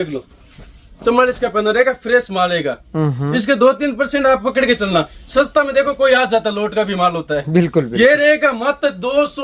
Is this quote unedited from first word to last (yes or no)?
yes